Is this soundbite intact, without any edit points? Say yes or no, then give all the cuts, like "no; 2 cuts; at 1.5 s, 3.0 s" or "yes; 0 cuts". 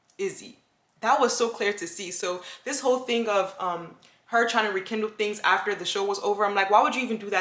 yes; 0 cuts